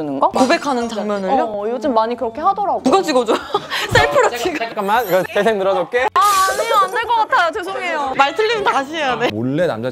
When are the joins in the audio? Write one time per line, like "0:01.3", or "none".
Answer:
none